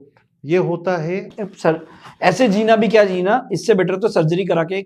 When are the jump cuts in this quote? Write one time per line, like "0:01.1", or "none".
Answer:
0:01.4